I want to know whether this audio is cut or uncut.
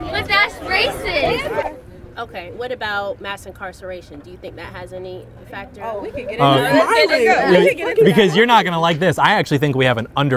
cut